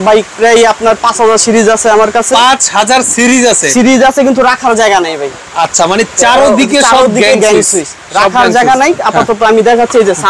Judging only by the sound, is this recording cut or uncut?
uncut